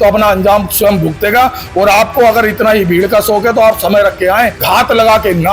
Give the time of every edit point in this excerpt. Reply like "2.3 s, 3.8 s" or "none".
4.6 s